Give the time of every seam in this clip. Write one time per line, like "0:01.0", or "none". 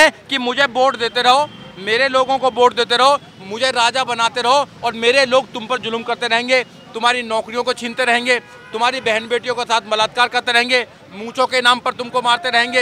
none